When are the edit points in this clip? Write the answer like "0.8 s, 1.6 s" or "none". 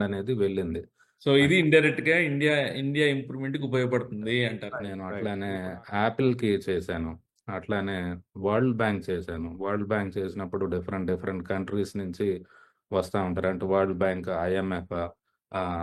5.0 s